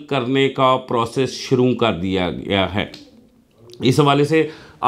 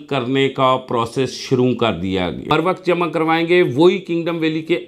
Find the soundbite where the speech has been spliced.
second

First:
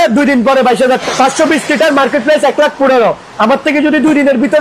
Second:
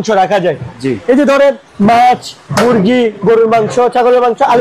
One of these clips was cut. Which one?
first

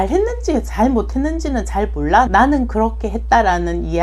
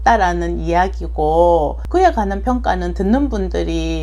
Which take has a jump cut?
first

